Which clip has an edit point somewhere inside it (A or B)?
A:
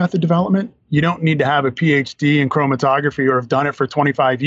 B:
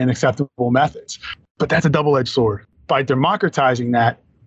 B